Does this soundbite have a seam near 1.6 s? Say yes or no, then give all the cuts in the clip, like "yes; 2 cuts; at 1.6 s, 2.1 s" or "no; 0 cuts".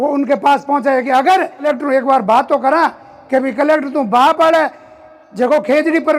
yes; 1 cut; at 1.6 s